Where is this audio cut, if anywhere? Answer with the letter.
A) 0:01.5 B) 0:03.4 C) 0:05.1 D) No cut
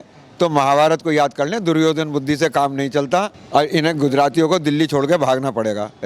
B